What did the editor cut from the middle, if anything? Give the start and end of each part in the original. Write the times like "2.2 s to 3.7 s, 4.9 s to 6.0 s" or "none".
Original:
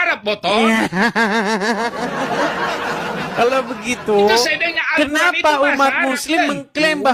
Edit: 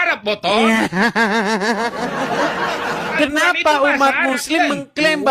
3.1 s to 4.9 s

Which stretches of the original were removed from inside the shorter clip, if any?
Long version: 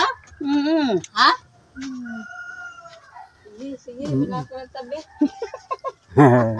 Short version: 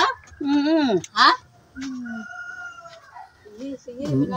none

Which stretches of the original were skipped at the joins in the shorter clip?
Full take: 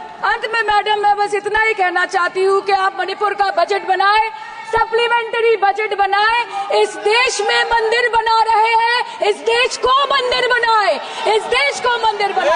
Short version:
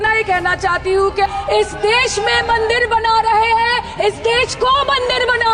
2.8 s to 6.5 s

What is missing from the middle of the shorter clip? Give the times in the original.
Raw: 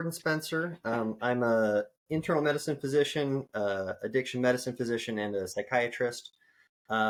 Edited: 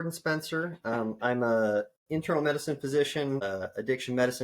3.5 s to 3.7 s

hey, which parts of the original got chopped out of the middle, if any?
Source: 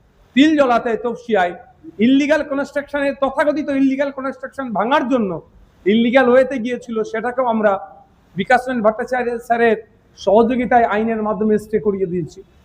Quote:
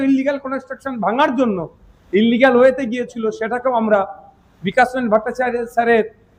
none

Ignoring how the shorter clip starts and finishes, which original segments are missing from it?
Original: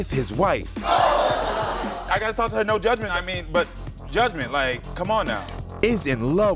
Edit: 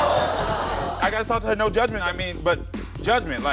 none

